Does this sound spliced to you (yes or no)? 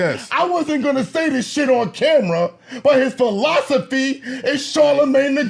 no